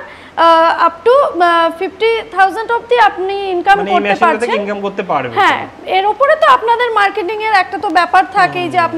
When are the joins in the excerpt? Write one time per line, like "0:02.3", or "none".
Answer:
none

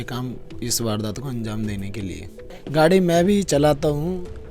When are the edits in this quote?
0:02.4

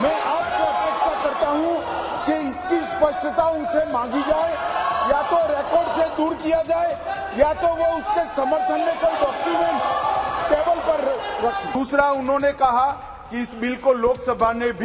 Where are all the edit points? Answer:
0:11.7

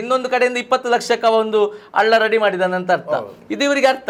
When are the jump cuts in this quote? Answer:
none

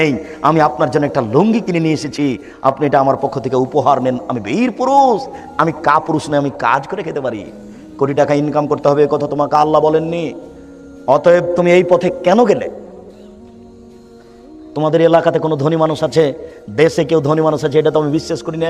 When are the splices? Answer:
0:13.2
0:14.7

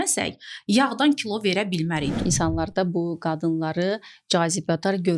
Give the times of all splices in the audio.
0:02.1

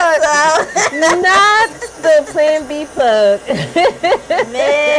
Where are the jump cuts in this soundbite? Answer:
none

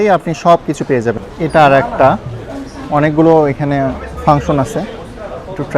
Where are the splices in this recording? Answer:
0:01.2

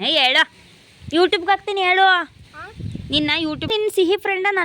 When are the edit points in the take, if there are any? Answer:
0:03.7

